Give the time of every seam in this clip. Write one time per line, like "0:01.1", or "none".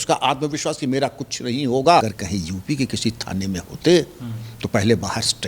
0:02.0